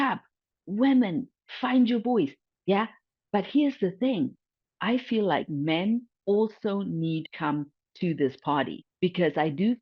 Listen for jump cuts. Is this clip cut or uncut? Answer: cut